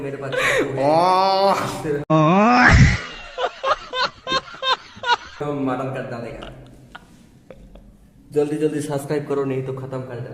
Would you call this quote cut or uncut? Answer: cut